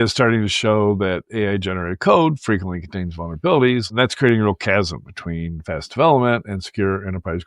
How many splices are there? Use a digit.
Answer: 1